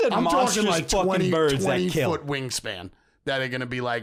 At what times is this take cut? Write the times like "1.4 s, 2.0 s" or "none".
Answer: none